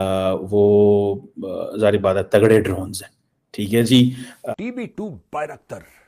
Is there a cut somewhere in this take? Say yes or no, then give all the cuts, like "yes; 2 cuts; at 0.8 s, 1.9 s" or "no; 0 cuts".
yes; 1 cut; at 4.3 s